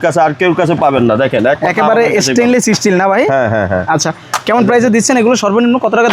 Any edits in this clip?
no; 0 cuts

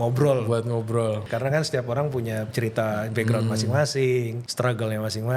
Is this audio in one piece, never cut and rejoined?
no; 3 cuts; at 1.2 s, 2.5 s, 4.4 s

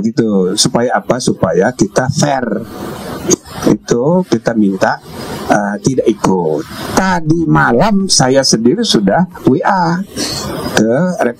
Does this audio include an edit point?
yes; 1 cut; at 3.4 s

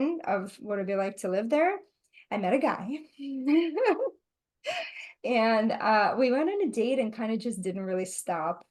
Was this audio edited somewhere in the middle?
no; 0 cuts

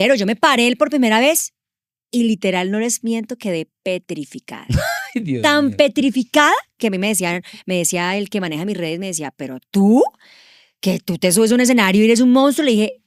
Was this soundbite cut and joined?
no; 0 cuts

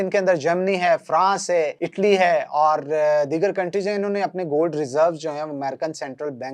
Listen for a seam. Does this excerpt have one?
no; 0 cuts

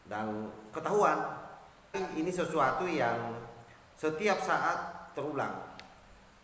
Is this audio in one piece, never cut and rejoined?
no; 1 cut; at 2.0 s

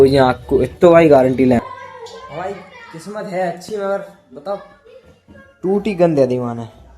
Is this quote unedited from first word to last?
no; 1 cut; at 1.6 s

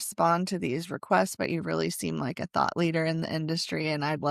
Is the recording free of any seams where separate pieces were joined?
yes; 0 cuts

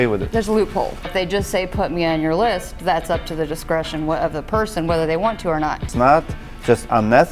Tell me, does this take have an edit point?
yes; 2 cuts; at 1.1 s, 5.8 s

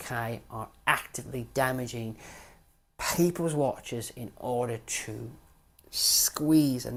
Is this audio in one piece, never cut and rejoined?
yes; 0 cuts

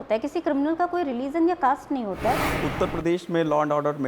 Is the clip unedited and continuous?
no; 1 cut; at 2.5 s

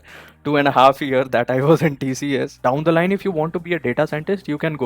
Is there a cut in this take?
yes; 1 cut; at 2.5 s

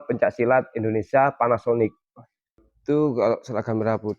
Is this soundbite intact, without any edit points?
no; 1 cut; at 2.7 s

